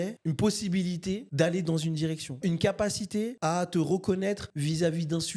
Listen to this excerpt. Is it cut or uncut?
cut